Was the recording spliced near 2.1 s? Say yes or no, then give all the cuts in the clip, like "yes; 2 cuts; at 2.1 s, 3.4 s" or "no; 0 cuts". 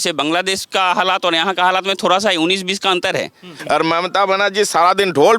no; 1 cut; at 3.5 s